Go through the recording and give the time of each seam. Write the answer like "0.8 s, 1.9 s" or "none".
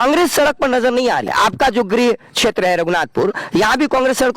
1.3 s